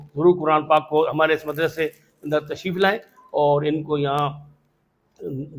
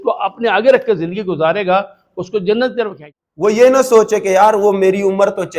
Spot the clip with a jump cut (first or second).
second